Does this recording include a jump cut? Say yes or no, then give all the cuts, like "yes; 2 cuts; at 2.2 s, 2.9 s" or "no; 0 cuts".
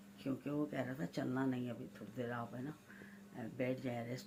no; 0 cuts